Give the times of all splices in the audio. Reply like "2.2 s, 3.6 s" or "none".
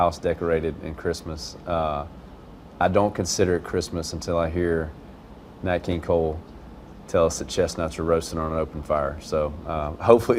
none